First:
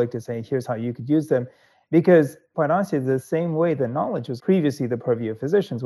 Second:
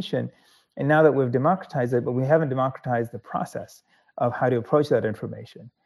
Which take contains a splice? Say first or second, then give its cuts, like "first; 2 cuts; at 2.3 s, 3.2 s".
first; 2 cuts; at 2.4 s, 4.3 s